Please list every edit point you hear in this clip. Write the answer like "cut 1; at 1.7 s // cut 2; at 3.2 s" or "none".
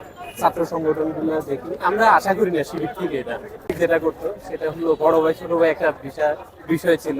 cut 1; at 3.7 s